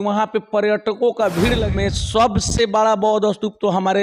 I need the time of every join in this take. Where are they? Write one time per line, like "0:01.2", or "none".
0:01.6